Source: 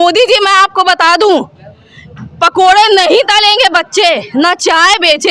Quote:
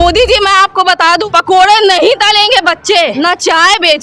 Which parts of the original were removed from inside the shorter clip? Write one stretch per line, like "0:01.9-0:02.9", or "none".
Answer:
0:01.2-0:02.3
0:04.2-0:04.3